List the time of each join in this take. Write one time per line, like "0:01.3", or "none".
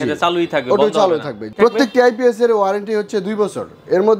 0:01.5